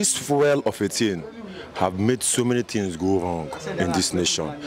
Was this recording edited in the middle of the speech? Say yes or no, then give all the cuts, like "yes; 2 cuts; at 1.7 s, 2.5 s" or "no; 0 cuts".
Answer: no; 0 cuts